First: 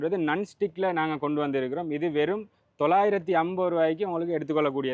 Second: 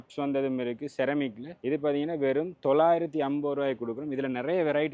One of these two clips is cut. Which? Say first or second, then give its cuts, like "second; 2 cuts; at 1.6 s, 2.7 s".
second; 1 cut; at 1.5 s